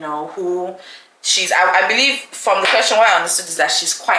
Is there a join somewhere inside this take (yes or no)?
no